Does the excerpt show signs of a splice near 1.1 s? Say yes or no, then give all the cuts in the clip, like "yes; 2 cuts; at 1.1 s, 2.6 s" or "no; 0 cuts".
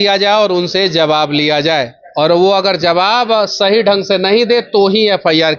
no; 0 cuts